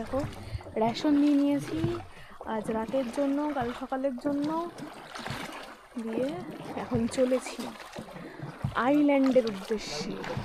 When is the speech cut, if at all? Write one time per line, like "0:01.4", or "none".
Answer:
none